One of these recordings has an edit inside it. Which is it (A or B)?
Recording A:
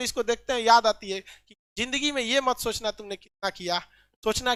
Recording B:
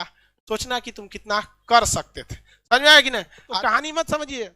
B